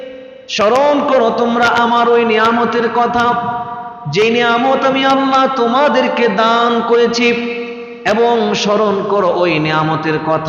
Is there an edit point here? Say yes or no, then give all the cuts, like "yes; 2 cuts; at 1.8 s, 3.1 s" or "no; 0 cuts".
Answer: no; 0 cuts